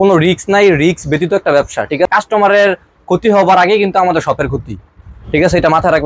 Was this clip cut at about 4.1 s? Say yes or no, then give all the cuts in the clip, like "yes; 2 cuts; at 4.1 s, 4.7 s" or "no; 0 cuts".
no; 1 cut; at 2.1 s